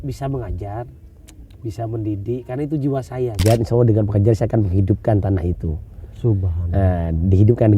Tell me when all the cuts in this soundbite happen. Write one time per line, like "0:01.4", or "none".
0:03.4